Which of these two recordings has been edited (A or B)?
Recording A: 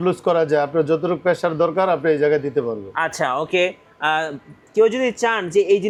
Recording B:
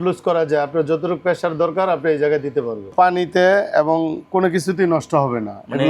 B